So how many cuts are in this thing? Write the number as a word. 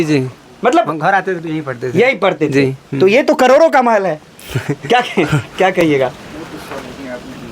zero